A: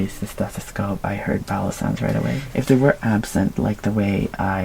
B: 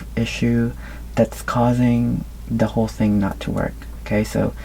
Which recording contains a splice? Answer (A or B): A